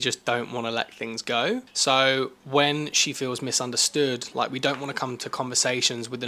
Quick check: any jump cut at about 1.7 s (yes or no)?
yes